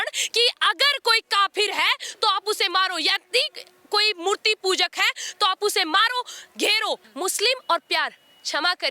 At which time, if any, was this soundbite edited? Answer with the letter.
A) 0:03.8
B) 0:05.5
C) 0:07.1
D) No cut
C